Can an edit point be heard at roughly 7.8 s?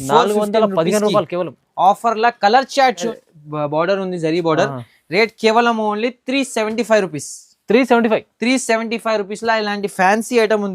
no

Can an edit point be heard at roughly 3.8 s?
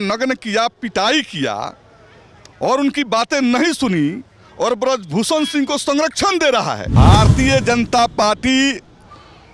no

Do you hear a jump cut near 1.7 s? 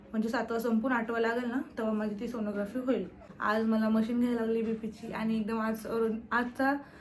no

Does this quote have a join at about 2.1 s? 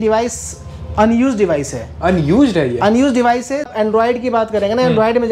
no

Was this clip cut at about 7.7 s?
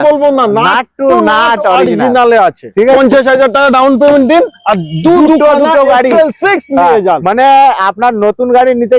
no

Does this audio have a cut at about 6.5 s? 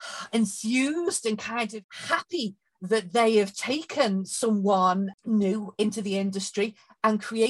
no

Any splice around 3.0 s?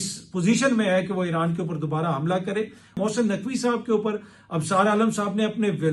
yes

